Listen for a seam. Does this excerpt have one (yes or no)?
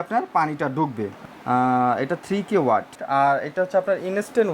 yes